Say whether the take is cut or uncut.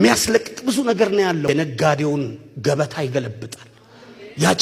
cut